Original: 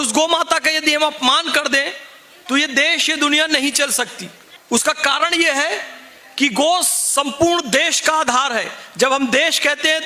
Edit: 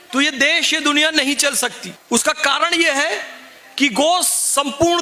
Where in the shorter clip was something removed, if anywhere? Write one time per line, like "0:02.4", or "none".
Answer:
0:01.9